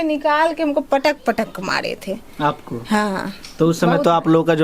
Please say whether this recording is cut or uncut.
uncut